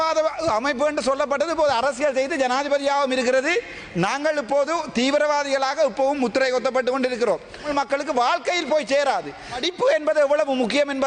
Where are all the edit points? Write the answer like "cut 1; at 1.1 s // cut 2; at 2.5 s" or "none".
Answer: cut 1; at 7.7 s // cut 2; at 9.7 s